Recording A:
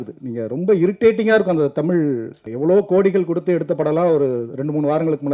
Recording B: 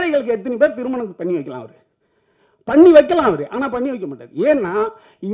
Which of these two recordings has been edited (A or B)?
A